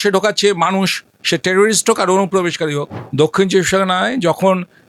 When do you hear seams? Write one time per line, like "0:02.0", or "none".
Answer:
0:03.3

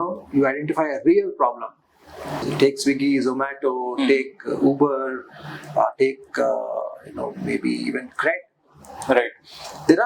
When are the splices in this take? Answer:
0:02.4

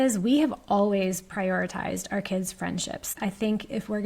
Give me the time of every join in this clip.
0:03.1

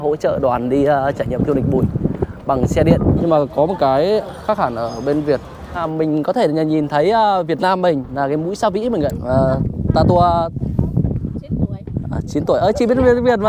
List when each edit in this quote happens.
0:03.2
0:05.7
0:09.2

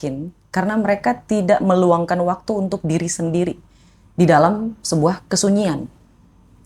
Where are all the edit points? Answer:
none

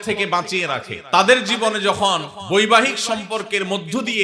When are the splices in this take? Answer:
0:00.9
0:02.3

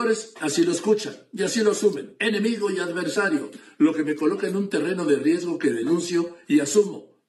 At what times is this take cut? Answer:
none

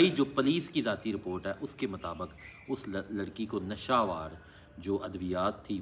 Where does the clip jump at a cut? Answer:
none

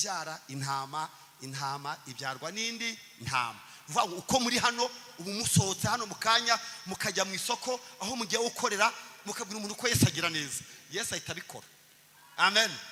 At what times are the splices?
none

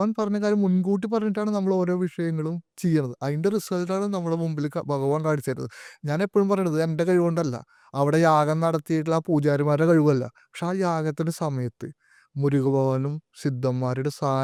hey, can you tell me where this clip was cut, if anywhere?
none

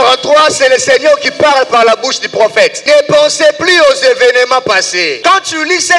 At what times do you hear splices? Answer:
0:02.8
0:05.2

